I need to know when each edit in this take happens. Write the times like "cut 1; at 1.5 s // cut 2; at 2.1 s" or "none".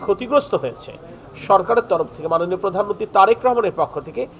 none